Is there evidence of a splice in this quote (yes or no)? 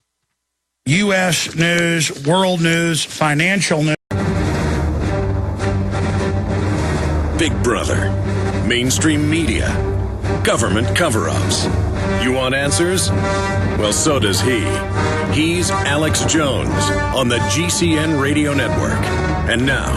no